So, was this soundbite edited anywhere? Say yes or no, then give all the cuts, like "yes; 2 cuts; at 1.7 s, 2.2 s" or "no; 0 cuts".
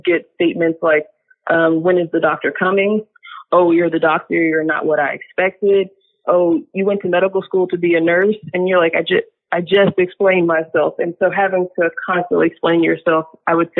no; 0 cuts